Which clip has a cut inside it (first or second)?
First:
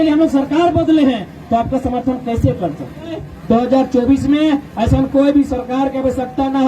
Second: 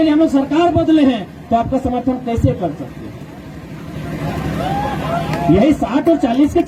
first